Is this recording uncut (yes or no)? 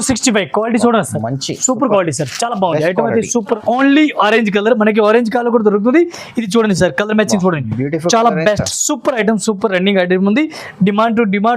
no